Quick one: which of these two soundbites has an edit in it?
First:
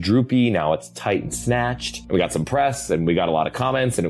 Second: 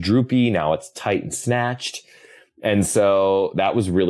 first; 1 cut; at 1.9 s

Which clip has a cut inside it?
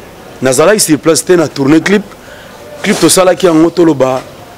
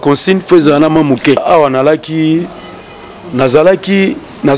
second; 1 cut; at 1.4 s

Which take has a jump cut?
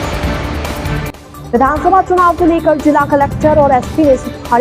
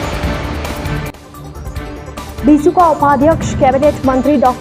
first; 1 cut; at 1.3 s

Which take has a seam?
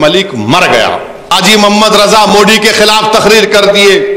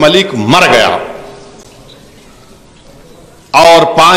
first; 1 cut; at 1.3 s

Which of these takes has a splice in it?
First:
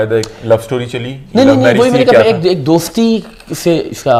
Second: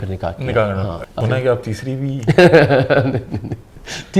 second; 1 cut; at 1.1 s

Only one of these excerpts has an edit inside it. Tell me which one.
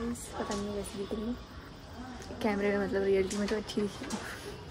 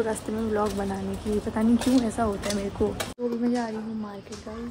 second; 1 cut; at 3.1 s

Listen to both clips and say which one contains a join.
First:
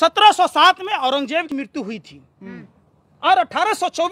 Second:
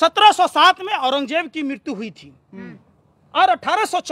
first; 1 cut; at 1.5 s

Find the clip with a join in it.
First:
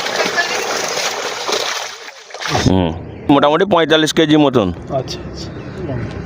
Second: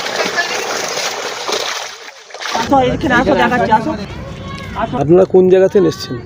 first; 1 cut; at 2.6 s

